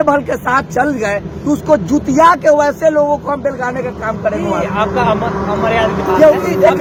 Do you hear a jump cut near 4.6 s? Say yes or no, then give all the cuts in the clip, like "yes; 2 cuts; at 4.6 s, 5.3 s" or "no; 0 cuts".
no; 0 cuts